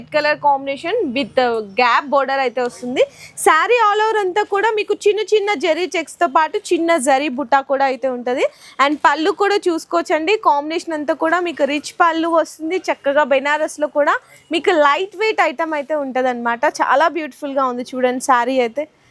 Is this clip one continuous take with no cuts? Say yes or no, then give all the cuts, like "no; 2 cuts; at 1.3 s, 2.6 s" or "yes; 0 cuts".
yes; 0 cuts